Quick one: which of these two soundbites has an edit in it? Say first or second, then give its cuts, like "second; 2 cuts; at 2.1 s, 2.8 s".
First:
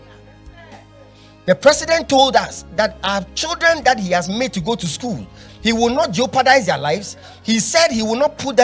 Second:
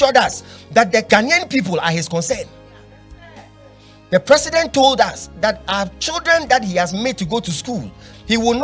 second; 1 cut; at 1.0 s